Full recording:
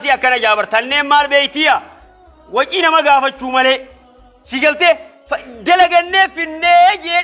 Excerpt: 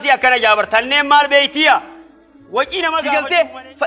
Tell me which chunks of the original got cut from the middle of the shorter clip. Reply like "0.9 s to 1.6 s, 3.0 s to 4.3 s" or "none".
3.0 s to 4.5 s